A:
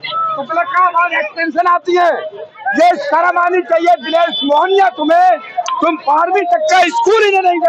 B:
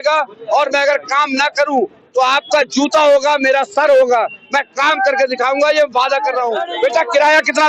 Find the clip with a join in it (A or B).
B